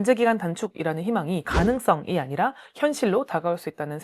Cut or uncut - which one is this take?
cut